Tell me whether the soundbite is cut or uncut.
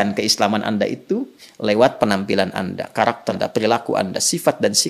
cut